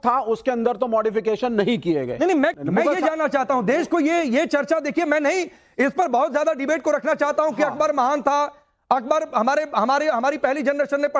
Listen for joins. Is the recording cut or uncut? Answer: cut